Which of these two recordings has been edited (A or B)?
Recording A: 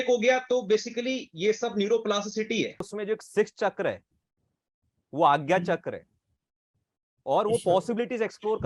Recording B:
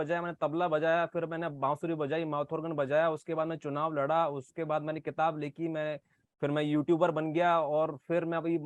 A